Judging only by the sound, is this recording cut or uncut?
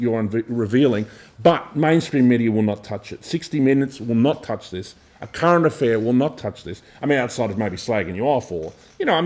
uncut